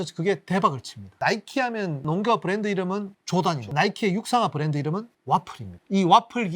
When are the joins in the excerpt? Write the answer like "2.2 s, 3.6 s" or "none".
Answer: 2.0 s, 3.6 s